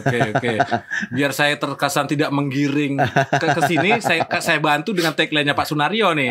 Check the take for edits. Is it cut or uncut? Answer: uncut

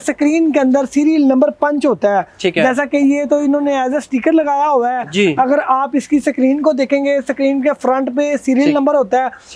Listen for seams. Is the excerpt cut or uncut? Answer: uncut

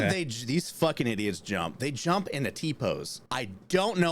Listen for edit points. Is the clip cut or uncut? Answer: cut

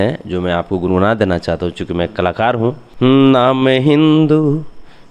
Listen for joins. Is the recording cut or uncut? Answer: cut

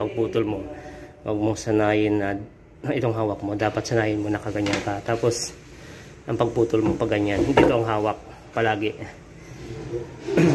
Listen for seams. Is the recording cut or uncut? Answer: uncut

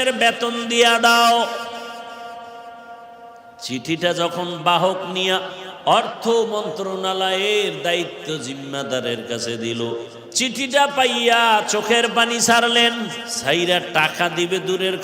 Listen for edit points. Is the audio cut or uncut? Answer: cut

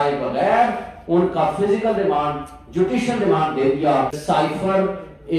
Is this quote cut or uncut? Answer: cut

